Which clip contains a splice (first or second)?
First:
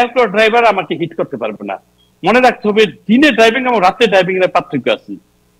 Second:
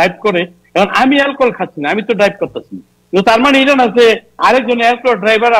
first